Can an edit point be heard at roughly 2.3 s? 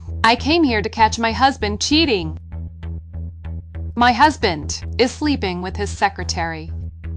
no; 0 cuts

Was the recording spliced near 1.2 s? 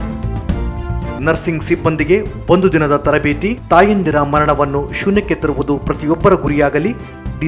yes; 1 cut; at 1.2 s

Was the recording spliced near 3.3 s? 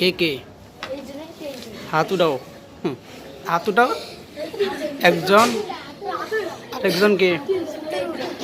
yes; 1 cut; at 3.3 s

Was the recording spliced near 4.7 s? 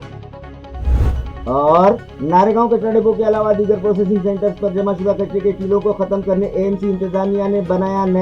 no; 1 cut; at 1.1 s

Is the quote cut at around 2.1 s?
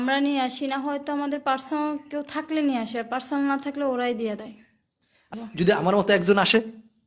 no; 1 cut; at 5.3 s

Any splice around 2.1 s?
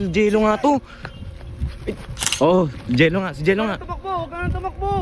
yes; 1 cut; at 2.1 s

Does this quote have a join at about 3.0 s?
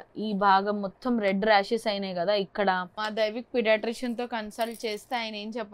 yes; 1 cut; at 3.0 s

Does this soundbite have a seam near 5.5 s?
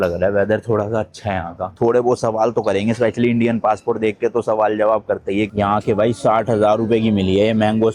yes; 2 cuts; at 1.6 s, 5.5 s

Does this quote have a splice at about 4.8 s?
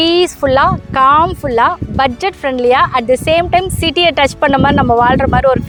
no; 0 cuts

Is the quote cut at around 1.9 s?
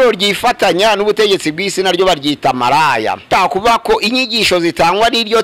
no; 1 cut; at 3.3 s

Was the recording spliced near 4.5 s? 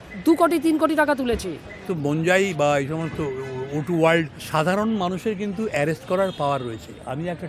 yes; 2 cuts; at 1.9 s, 4.5 s

